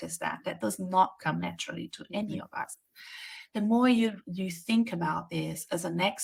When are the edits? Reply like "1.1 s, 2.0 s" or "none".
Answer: none